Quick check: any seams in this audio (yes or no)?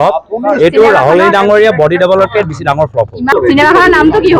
yes